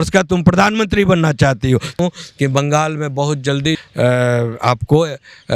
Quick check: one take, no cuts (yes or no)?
no